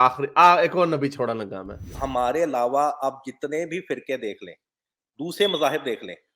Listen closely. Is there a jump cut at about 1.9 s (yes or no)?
yes